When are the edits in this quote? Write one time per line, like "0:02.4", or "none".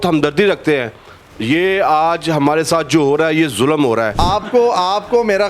0:04.1